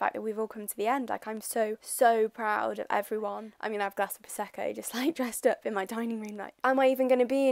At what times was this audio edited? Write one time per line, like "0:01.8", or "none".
0:03.6
0:06.6